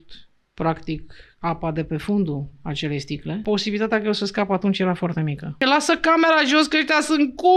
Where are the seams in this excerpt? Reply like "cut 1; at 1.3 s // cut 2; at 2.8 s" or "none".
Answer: cut 1; at 3.4 s // cut 2; at 5.6 s